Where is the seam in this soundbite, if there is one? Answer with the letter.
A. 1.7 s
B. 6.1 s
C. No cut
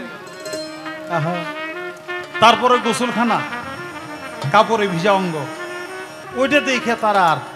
B